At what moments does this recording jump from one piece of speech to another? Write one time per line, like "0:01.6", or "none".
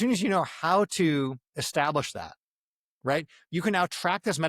none